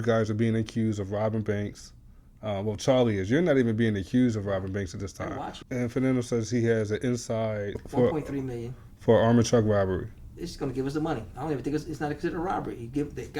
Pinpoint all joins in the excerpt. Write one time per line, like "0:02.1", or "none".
0:05.6
0:07.8